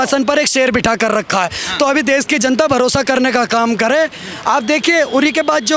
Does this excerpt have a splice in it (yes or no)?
no